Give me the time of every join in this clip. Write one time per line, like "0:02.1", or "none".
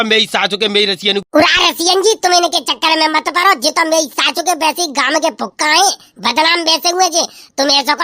0:01.2